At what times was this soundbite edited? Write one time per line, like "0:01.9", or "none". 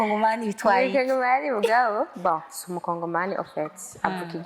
none